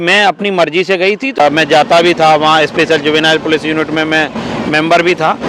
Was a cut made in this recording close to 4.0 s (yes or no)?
no